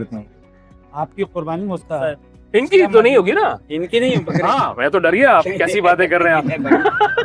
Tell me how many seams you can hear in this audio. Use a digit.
0